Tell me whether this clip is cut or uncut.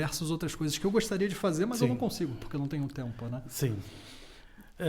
uncut